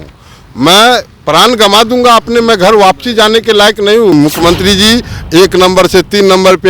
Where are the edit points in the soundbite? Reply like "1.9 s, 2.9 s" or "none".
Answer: 4.1 s